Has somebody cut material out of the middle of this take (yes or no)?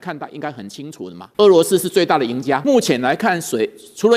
yes